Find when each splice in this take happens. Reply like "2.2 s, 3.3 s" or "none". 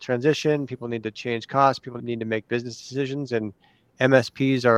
2.0 s